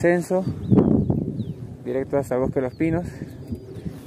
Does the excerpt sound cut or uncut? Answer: uncut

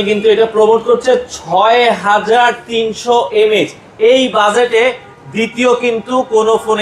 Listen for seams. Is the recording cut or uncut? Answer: uncut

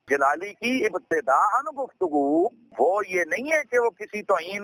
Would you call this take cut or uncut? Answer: uncut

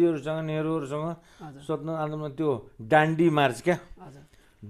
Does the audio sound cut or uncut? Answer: uncut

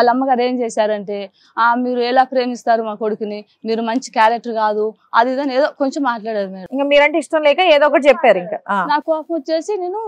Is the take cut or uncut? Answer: uncut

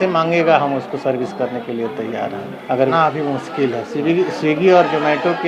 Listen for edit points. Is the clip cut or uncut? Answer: cut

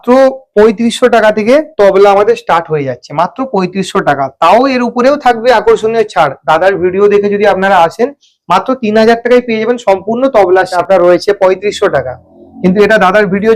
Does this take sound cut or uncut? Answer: cut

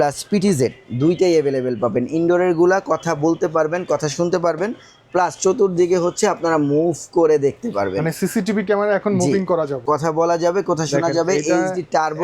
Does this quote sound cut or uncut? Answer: cut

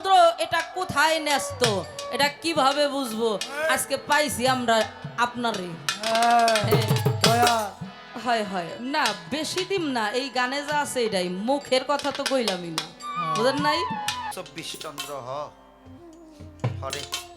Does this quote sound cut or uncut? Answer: cut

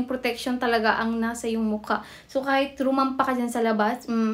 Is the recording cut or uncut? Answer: uncut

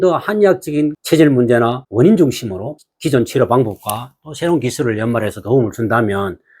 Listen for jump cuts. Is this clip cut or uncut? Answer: cut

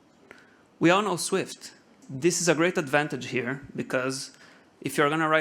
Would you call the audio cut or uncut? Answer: cut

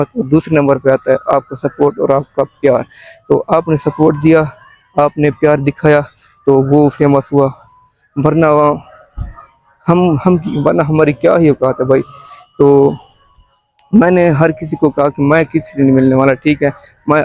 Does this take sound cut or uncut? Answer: uncut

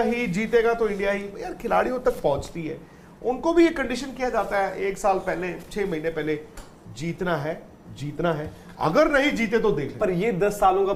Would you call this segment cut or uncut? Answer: uncut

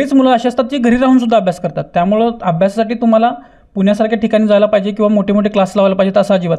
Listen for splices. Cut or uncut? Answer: uncut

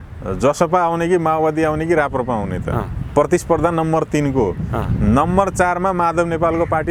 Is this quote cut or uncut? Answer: uncut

